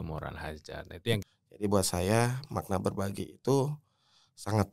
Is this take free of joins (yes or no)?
no